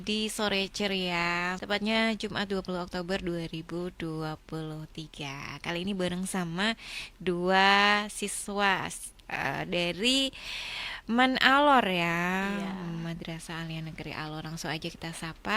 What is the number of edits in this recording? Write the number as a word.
one